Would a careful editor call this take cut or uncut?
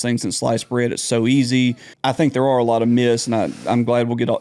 cut